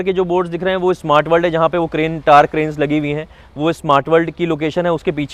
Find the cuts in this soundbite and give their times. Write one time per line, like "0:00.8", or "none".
none